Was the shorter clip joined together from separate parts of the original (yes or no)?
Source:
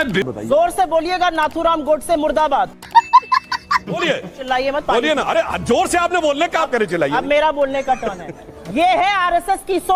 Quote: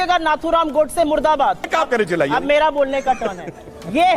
yes